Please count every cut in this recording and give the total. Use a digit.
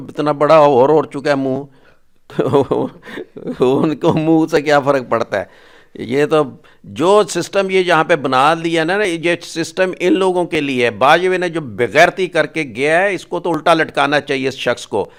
0